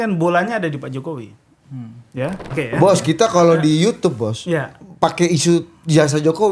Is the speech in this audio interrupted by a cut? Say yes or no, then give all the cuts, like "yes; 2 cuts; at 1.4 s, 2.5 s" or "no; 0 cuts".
yes; 1 cut; at 2.5 s